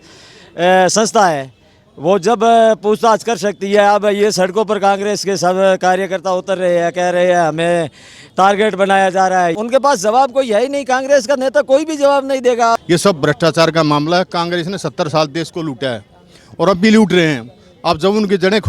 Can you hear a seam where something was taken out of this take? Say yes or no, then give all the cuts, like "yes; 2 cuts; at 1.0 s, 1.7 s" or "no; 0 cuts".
yes; 2 cuts; at 9.5 s, 12.8 s